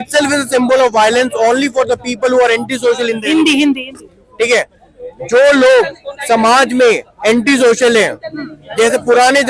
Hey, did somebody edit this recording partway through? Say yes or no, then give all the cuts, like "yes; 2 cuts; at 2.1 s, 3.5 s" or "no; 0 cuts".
no; 0 cuts